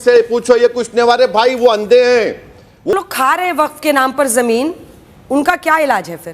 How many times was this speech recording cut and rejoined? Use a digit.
1